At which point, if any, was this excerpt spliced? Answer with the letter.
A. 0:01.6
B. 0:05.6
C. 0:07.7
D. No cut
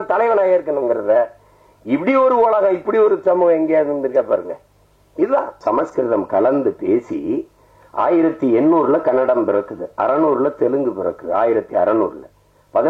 B